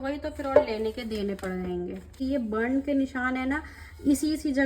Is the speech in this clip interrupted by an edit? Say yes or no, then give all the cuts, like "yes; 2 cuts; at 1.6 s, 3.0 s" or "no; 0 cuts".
yes; 1 cut; at 2.2 s